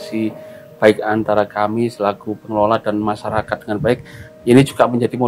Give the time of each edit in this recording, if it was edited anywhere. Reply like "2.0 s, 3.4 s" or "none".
none